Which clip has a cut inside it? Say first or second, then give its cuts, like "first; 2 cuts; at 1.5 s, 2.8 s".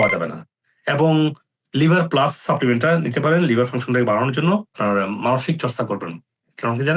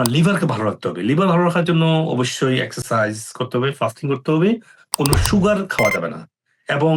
first; 1 cut; at 4.8 s